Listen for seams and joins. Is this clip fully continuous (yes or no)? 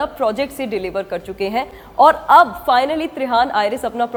yes